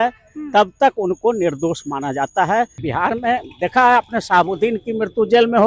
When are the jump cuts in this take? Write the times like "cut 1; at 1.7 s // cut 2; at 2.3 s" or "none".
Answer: cut 1; at 2.8 s